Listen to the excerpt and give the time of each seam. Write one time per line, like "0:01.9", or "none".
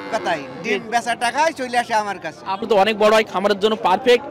0:02.6